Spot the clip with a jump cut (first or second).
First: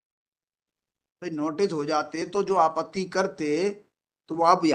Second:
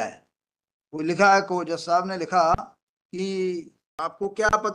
second